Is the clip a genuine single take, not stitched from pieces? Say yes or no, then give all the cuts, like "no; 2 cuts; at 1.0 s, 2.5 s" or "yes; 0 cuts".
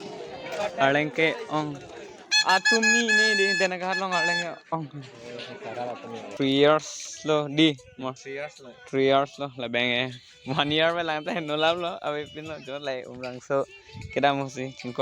no; 2 cuts; at 6.3 s, 12.4 s